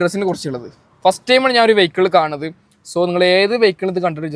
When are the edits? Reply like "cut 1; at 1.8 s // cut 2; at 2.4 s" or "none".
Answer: none